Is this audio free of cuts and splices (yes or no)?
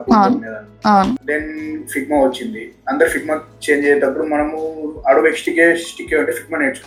yes